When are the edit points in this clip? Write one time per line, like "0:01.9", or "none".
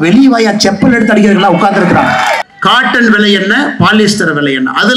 0:02.4